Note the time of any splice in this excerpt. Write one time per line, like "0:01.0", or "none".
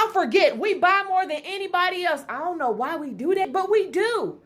0:03.5